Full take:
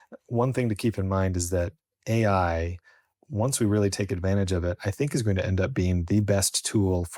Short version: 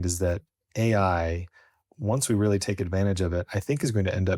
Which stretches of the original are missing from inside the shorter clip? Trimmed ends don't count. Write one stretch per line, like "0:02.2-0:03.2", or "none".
none